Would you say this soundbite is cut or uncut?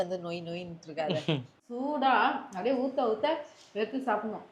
cut